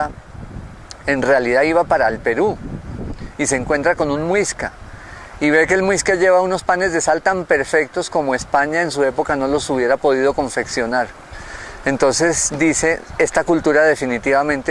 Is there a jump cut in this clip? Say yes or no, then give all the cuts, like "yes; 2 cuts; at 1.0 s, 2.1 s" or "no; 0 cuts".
yes; 1 cut; at 1.9 s